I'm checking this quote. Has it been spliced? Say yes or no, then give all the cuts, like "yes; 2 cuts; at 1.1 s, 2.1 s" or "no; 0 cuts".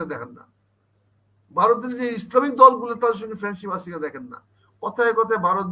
no; 0 cuts